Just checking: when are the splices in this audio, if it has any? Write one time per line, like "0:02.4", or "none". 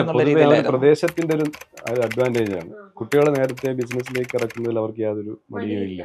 none